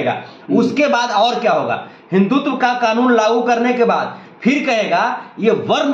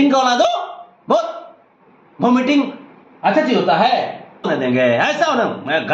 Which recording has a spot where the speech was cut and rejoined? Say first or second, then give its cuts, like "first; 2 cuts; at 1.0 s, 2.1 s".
second; 1 cut; at 4.5 s